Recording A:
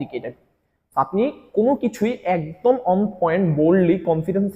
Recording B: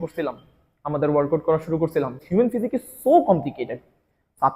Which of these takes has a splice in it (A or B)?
B